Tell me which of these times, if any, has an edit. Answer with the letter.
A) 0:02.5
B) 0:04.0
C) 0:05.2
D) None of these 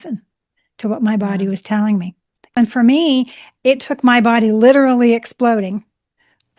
A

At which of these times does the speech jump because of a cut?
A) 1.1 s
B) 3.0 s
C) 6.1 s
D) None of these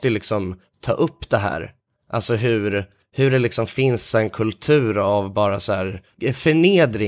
B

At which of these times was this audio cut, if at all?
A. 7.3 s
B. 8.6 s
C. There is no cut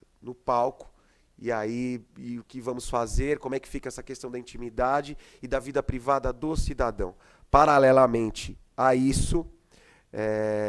A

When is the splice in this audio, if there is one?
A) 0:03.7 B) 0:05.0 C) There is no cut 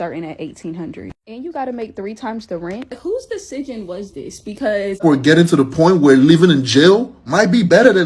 B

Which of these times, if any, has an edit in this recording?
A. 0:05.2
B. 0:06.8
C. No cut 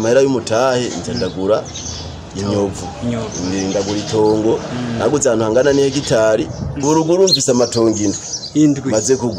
B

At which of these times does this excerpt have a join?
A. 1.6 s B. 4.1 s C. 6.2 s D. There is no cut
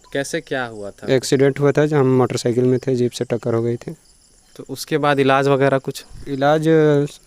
D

